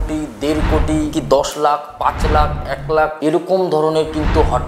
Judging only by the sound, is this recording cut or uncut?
uncut